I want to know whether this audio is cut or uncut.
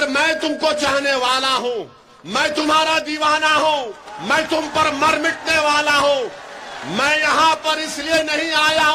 uncut